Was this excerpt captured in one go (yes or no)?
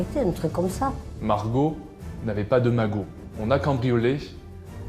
no